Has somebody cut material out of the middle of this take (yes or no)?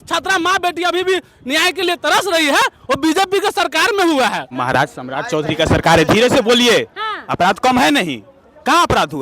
yes